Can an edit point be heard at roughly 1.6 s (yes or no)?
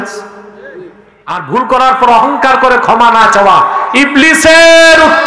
yes